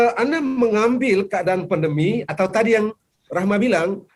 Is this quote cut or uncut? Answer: uncut